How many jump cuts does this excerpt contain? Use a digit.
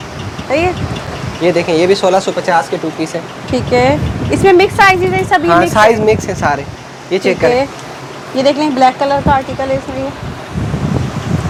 0